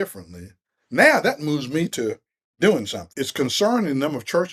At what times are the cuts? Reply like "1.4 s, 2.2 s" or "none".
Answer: 3.0 s